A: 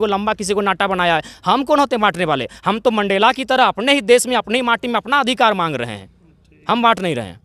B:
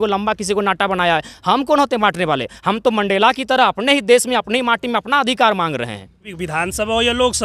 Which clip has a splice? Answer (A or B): B